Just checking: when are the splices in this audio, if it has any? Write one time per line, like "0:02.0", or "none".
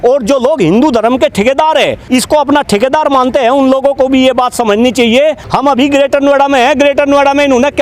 0:02.0
0:05.4

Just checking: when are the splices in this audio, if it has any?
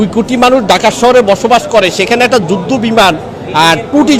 none

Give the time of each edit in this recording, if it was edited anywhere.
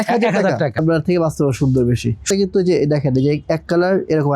0:00.8
0:02.2

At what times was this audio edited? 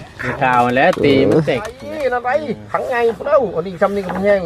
0:01.9

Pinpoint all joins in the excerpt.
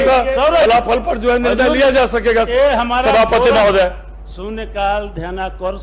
none

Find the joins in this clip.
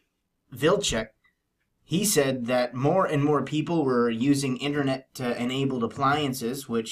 0:01.9

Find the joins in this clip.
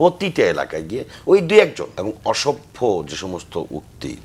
0:01.9

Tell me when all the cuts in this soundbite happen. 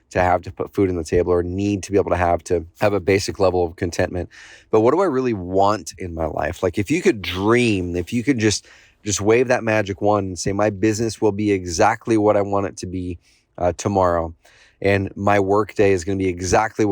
0:02.7

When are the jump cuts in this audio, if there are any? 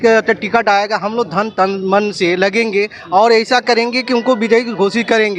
none

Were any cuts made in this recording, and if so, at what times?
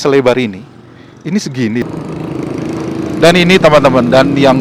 0:01.8

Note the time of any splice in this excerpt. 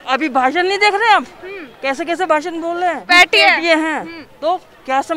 0:03.0

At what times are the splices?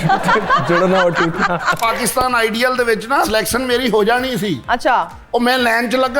0:01.8
0:03.3

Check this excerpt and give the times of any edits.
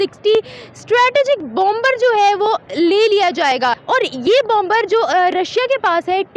0:03.8

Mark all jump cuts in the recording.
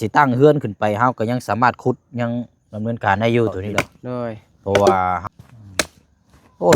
0:05.2

